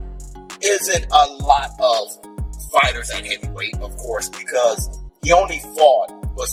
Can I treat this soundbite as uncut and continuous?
yes; 0 cuts

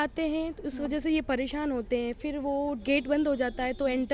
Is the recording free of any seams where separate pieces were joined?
yes; 0 cuts

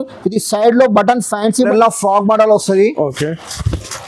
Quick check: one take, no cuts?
no; 1 cut; at 1.7 s

